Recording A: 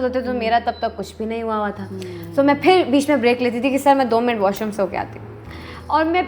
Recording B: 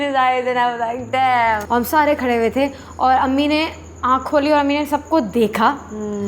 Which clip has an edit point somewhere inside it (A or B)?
B